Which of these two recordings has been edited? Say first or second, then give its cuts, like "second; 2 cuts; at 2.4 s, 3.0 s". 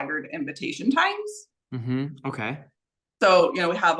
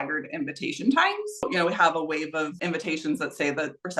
second; 2 cuts; at 1.4 s, 2.5 s